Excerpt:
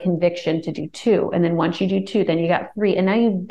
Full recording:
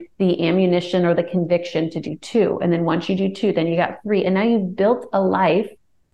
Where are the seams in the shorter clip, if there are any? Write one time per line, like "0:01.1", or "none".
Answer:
none